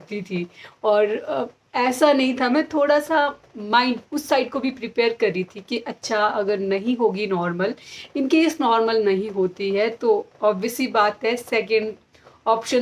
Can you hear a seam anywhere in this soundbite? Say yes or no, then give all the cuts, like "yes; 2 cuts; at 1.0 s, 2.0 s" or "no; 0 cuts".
no; 0 cuts